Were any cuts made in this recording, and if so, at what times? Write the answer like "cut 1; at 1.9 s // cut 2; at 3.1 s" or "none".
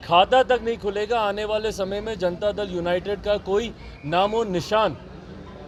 none